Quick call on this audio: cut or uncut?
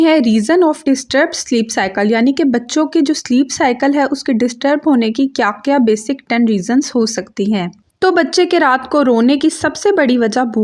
uncut